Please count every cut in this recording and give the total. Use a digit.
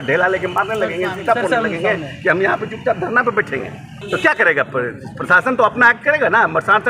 1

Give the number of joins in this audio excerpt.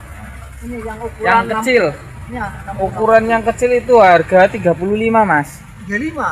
0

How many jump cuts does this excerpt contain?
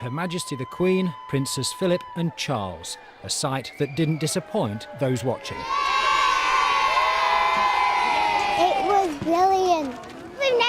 1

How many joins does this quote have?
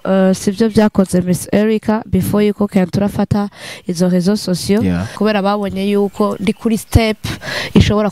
1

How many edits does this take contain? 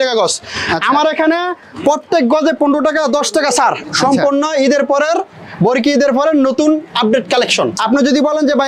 2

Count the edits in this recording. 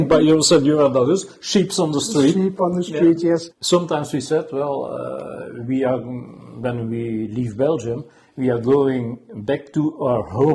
1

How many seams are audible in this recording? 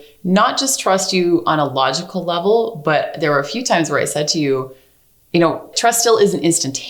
1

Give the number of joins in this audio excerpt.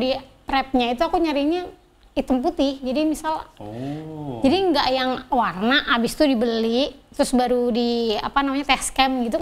0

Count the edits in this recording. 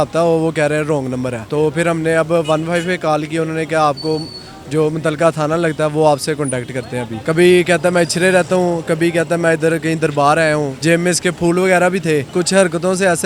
4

